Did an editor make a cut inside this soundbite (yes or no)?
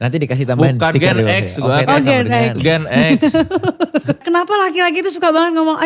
yes